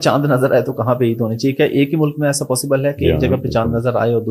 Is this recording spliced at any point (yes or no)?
no